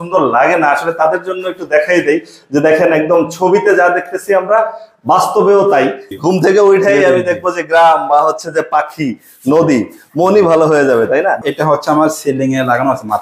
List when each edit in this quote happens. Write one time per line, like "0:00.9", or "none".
0:06.1
0:11.5

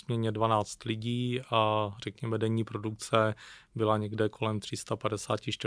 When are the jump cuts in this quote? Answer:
none

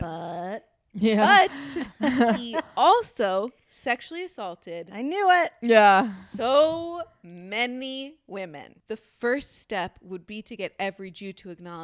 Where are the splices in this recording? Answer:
0:08.7

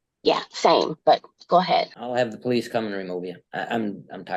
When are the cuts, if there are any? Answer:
0:00.9
0:02.0
0:03.4

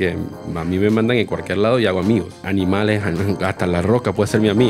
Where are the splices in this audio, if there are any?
0:02.4

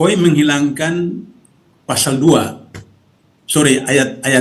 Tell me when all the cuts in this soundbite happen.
none

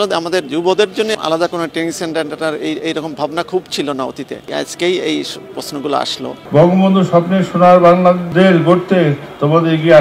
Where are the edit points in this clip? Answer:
0:01.1
0:06.3
0:08.2

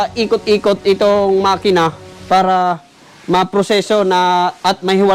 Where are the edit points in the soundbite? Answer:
none

